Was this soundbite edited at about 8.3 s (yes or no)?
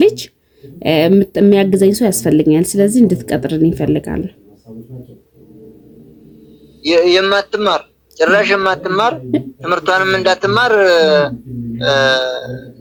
no